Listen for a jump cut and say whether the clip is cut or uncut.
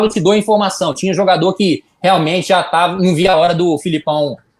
uncut